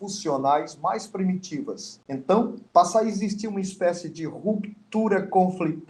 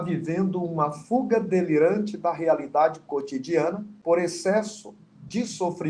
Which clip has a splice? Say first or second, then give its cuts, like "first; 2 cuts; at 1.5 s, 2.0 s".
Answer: second; 1 cut; at 3.9 s